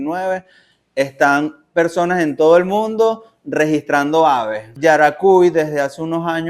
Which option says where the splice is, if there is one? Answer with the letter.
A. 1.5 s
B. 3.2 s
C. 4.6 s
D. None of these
C